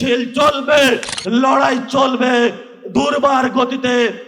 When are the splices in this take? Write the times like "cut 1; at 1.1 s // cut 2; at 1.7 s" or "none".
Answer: cut 1; at 1.1 s